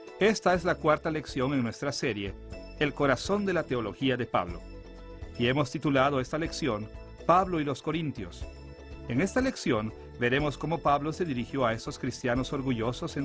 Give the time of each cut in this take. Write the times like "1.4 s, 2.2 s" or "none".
6.0 s